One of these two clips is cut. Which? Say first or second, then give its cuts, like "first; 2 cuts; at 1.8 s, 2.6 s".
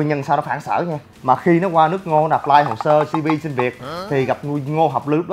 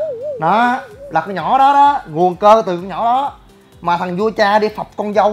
first; 1 cut; at 1.1 s